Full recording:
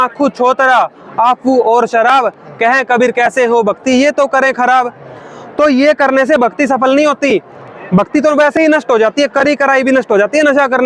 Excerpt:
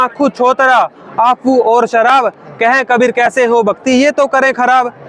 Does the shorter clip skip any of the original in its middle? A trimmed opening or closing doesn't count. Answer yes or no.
no